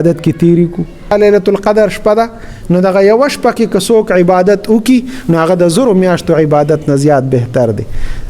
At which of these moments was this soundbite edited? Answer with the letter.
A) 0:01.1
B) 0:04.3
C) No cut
A